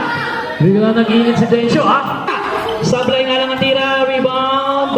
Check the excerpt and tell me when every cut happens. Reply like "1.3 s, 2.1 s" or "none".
2.2 s